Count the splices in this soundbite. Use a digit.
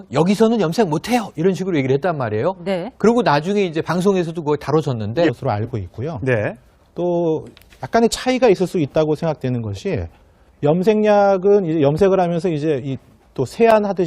0